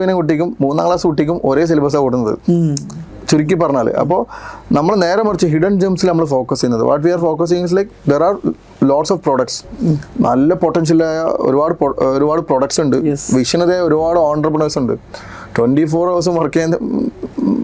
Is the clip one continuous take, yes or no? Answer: yes